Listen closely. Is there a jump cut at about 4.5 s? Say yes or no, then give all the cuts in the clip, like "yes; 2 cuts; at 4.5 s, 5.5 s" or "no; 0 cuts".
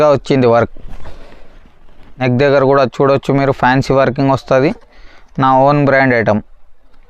no; 1 cut; at 2.2 s